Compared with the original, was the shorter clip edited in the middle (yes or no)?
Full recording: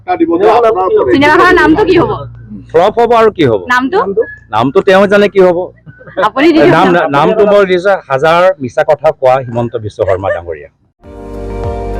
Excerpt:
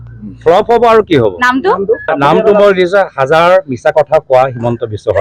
yes